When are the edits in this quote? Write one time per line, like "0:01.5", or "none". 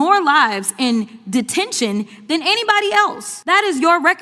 0:03.3